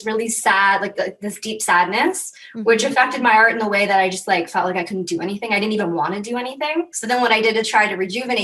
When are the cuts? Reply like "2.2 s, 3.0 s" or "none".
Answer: 7.0 s